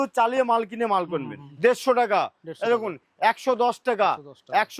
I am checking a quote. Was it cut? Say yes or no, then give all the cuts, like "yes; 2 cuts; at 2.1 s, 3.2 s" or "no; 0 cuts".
yes; 1 cut; at 1.4 s